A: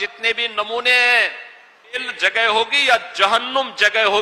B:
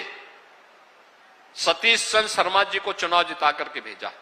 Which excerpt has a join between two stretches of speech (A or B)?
A